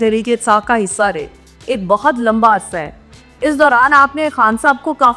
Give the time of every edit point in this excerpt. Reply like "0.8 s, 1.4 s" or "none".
none